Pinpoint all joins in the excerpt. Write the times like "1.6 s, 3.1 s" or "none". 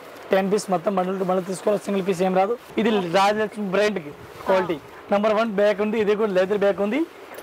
2.7 s